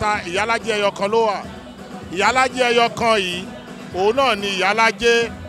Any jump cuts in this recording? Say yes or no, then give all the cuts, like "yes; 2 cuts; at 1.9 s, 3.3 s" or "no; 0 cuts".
no; 0 cuts